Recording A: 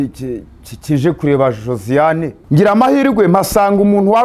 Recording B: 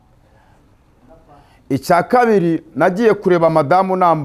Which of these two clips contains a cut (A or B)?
A